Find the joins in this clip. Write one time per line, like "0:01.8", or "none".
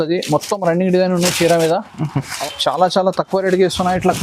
0:02.3